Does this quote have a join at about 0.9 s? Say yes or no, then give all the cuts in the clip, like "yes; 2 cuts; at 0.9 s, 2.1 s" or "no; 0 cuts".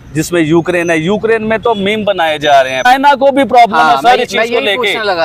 no; 1 cut; at 2.9 s